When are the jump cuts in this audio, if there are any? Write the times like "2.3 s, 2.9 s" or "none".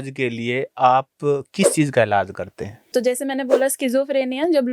2.9 s